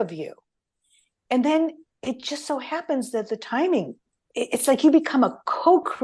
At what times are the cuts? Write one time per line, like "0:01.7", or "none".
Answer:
0:04.0